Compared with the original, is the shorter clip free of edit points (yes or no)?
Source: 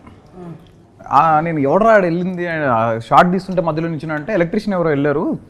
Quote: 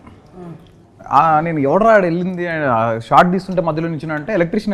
yes